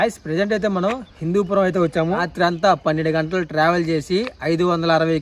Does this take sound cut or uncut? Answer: cut